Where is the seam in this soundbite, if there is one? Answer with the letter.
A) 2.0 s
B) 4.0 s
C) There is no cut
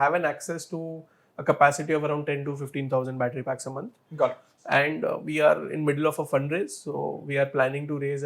B